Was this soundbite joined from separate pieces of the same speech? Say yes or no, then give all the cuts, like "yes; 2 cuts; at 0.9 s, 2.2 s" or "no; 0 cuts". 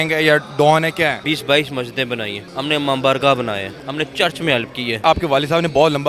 yes; 4 cuts; at 1.2 s, 2.4 s, 3.8 s, 5.0 s